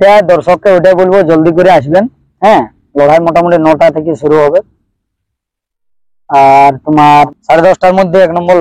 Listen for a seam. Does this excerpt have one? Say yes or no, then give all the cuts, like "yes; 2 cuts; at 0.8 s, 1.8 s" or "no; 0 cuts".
yes; 1 cut; at 7.3 s